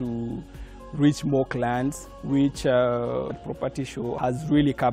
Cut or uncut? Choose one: cut